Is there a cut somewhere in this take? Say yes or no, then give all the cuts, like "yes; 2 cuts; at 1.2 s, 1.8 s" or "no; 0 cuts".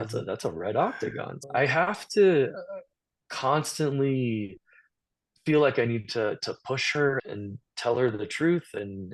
yes; 2 cuts; at 1.3 s, 7.2 s